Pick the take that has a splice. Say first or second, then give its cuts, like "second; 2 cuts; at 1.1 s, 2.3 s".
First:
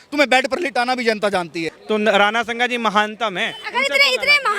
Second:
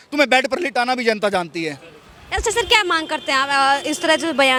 first; 1 cut; at 1.7 s